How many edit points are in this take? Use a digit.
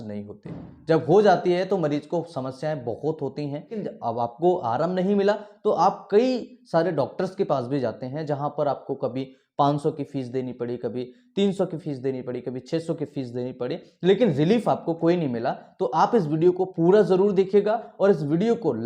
1